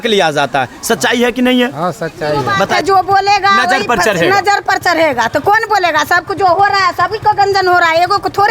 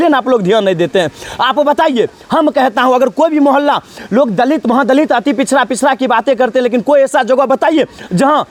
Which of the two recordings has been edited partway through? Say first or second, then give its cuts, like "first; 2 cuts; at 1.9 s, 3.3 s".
first; 1 cut; at 2.7 s